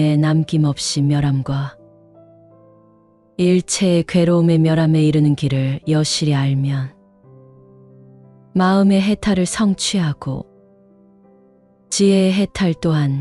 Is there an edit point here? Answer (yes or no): yes